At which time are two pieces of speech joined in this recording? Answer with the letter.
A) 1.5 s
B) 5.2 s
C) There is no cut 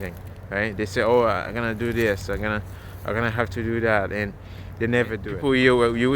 B